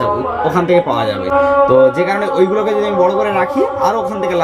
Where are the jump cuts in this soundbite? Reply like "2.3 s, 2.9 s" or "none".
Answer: none